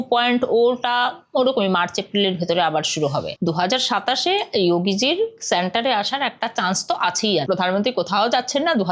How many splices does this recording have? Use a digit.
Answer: 2